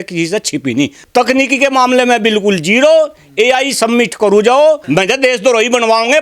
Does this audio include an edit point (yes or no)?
yes